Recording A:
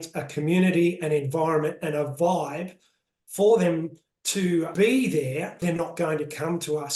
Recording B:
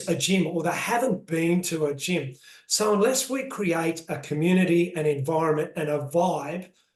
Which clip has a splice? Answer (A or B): A